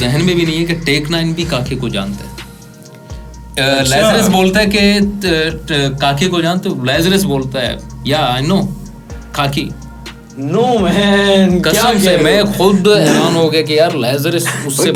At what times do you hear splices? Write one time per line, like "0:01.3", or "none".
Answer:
none